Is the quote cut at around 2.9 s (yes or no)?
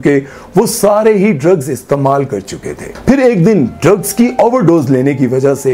yes